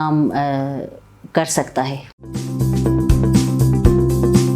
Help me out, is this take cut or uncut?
cut